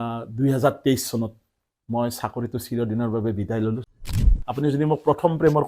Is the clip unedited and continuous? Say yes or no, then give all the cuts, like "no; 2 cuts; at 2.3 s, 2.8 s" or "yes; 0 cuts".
no; 1 cut; at 4.2 s